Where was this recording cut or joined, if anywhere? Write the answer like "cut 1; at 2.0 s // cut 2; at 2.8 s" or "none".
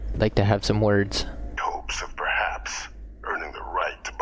cut 1; at 1.5 s